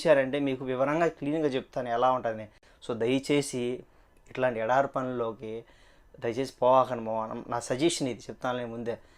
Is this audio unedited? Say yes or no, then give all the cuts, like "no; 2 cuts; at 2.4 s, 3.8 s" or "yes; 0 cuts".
yes; 0 cuts